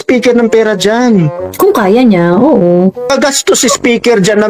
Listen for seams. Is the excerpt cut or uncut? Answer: cut